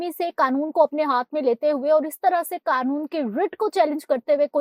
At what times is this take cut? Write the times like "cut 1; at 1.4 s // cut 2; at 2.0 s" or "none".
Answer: none